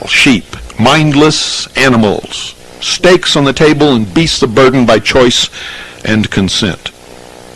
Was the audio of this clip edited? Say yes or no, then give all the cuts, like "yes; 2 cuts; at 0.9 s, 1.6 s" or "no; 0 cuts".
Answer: no; 0 cuts